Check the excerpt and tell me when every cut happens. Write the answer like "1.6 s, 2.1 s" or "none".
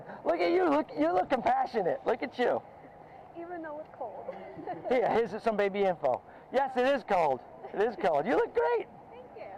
none